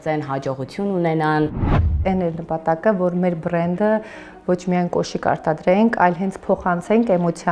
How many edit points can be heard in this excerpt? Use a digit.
1